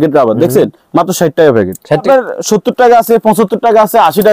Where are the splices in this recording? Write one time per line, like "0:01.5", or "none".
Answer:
0:02.0